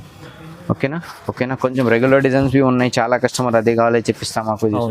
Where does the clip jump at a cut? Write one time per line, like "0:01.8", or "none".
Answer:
0:01.1